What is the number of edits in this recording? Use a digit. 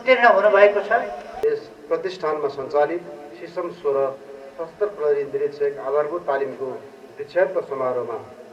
1